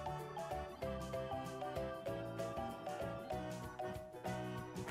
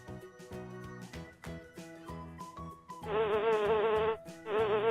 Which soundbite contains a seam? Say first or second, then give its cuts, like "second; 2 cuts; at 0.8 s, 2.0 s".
second; 1 cut; at 3.1 s